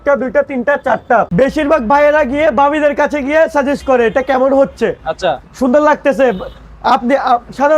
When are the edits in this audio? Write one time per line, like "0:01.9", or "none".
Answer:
0:01.3